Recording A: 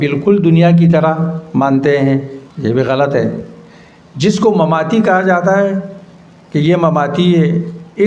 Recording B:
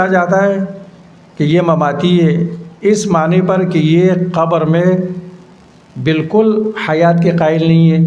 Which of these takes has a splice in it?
A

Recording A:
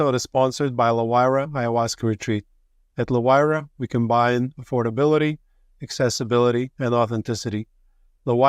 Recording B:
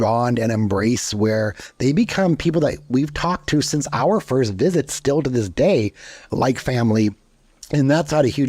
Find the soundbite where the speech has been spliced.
B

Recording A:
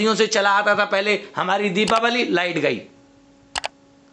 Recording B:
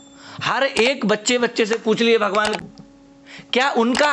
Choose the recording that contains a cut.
B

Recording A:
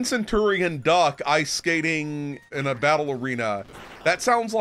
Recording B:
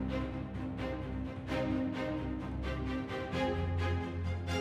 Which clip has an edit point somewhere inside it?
A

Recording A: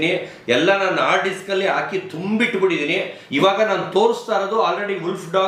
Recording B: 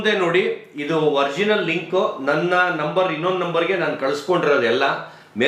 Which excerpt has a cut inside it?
A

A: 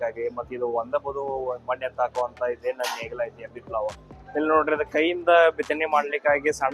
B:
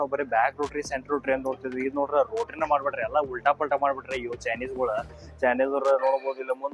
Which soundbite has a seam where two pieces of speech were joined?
A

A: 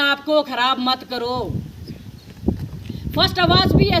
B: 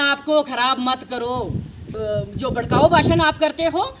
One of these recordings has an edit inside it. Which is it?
B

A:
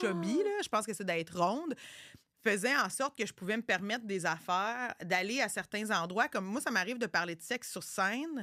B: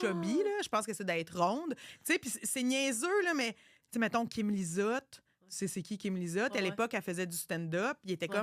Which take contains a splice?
B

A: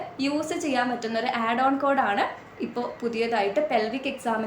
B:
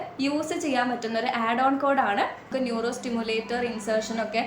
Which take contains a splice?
B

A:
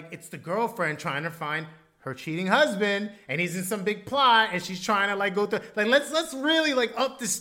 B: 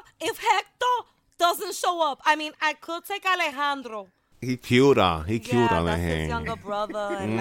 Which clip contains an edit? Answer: B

